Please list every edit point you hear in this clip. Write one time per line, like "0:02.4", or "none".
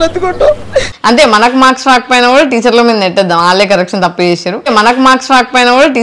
0:00.9